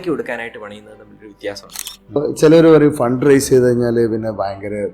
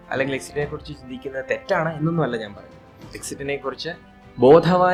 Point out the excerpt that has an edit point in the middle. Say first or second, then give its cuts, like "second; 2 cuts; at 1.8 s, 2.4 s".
first; 1 cut; at 2.2 s